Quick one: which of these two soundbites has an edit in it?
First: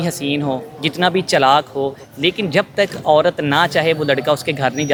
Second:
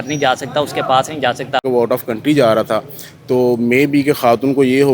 second; 1 cut; at 1.6 s

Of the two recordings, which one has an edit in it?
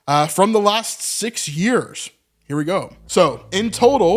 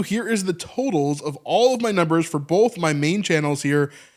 first; 1 cut; at 3.0 s

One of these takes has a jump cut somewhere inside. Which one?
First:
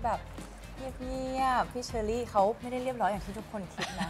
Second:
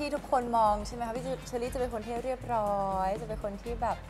first; 2 cuts; at 1.8 s, 2.6 s

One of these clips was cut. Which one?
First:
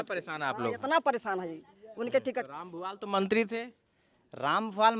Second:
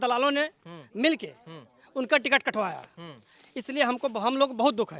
first; 1 cut; at 2.5 s

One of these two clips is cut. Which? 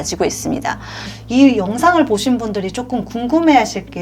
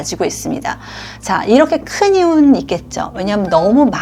first; 1 cut; at 1.1 s

